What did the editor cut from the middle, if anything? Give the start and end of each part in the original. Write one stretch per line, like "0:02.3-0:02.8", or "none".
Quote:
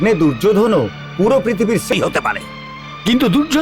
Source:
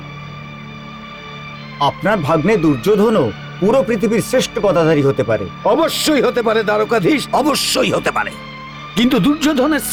0:04.4-0:07.8